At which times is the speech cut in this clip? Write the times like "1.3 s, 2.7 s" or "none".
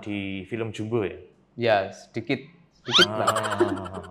none